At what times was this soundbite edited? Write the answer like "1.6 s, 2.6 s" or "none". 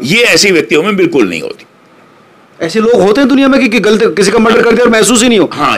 none